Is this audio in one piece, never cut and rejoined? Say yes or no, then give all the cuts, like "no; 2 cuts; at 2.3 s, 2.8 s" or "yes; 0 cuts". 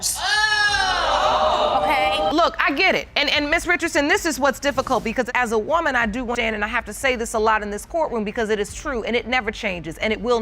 no; 1 cut; at 2.3 s